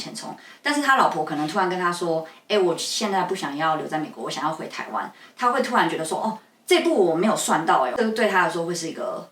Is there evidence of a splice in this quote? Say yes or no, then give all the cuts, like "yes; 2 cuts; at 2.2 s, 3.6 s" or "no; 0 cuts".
yes; 1 cut; at 7.9 s